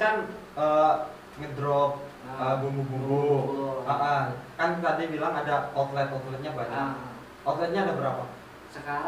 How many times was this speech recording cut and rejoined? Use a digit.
0